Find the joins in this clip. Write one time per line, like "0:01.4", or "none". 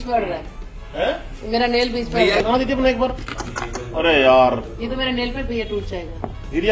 0:02.4